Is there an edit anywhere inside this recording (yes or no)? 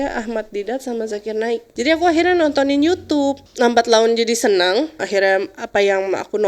yes